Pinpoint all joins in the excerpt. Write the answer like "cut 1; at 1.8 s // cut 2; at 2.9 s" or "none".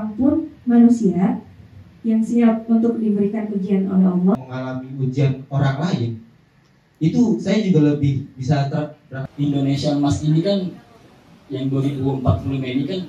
cut 1; at 4.4 s // cut 2; at 9.2 s